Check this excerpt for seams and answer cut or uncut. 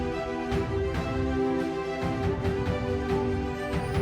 uncut